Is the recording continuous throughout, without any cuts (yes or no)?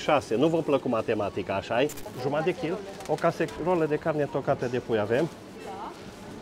yes